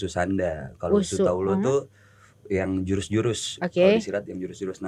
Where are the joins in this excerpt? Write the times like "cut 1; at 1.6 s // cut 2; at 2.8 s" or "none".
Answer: none